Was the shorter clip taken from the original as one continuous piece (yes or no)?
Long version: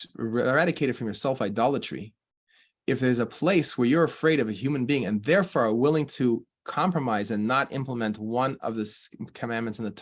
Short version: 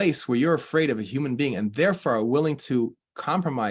yes